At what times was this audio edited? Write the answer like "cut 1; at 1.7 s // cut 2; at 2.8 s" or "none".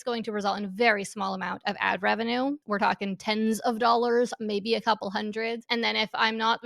cut 1; at 2.6 s // cut 2; at 5.6 s

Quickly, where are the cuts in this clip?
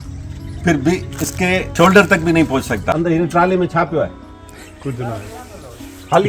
cut 1; at 1.7 s // cut 2; at 2.9 s

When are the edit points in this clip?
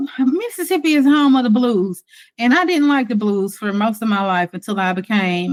none

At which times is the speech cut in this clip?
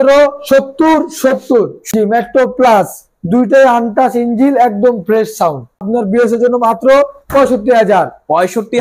cut 1; at 1.8 s // cut 2; at 5.8 s

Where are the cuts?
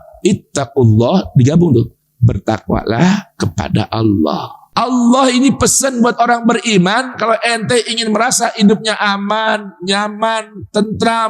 cut 1; at 4.6 s

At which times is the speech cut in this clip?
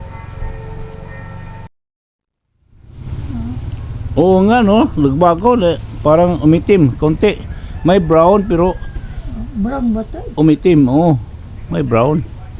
cut 1; at 1.7 s

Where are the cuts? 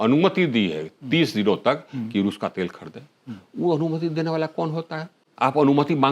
cut 1; at 5.2 s

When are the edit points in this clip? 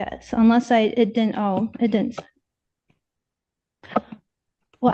none

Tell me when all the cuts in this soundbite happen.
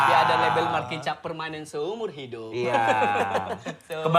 none

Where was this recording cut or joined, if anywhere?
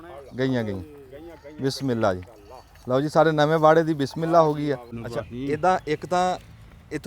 cut 1; at 4.9 s

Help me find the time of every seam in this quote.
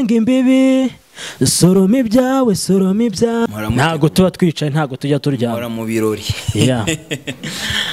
cut 1; at 3.5 s

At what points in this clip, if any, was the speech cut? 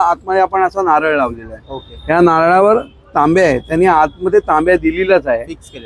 none

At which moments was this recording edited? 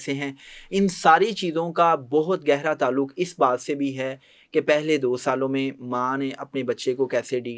none

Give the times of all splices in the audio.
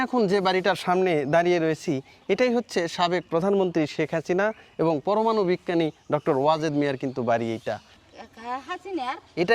cut 1; at 7.9 s

